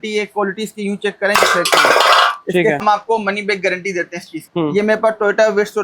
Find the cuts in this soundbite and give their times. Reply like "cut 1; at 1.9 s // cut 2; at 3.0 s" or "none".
cut 1; at 2.8 s // cut 2; at 4.4 s